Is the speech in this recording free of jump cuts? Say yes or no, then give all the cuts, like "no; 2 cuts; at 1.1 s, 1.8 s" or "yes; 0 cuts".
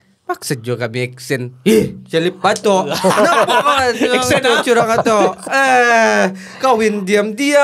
yes; 0 cuts